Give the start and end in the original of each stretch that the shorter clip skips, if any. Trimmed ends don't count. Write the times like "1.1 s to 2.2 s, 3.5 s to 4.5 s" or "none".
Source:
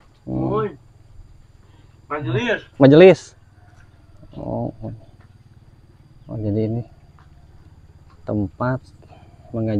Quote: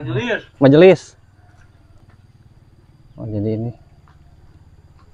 4.2 s to 5.1 s